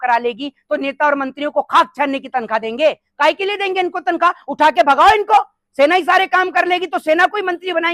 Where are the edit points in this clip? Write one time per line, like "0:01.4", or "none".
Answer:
none